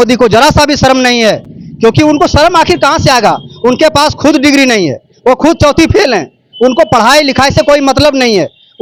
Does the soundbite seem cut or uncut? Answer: uncut